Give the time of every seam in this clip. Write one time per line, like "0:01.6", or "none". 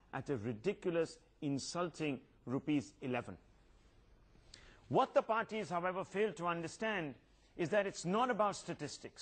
0:01.3

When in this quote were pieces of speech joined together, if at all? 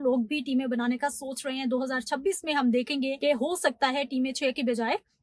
0:03.2

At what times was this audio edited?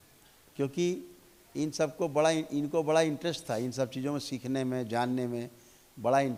none

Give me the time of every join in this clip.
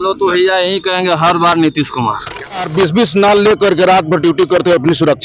0:02.7

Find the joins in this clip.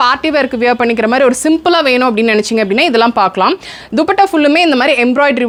none

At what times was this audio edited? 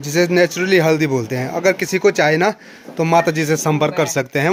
none

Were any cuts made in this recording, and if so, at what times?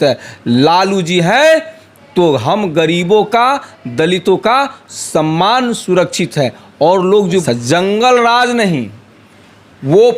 0:07.4

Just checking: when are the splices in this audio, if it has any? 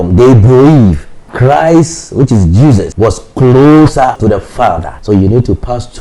0:01.2
0:02.9
0:04.5

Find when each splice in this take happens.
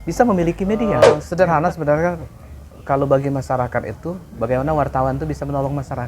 0:01.2

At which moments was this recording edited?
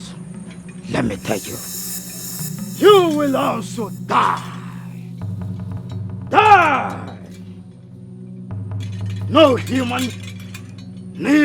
0:09.1

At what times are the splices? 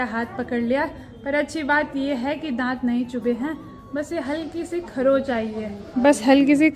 none

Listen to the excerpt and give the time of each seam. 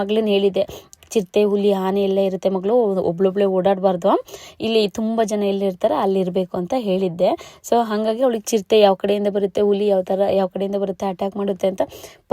none

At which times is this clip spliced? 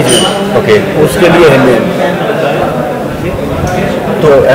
none

